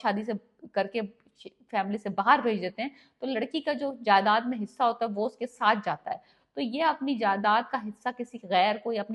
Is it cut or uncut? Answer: uncut